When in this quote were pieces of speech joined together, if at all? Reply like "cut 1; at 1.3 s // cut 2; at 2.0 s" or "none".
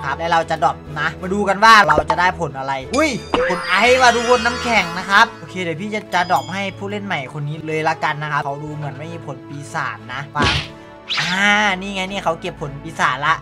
cut 1; at 1.8 s // cut 2; at 11.2 s